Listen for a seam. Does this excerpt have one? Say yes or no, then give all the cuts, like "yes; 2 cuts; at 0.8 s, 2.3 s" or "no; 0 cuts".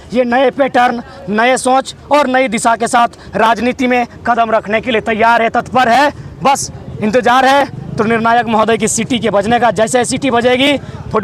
no; 0 cuts